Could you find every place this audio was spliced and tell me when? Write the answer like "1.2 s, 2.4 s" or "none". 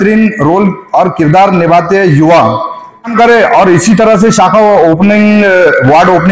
3.1 s